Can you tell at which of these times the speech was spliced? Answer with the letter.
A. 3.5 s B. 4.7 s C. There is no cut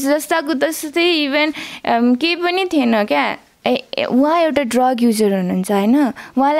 A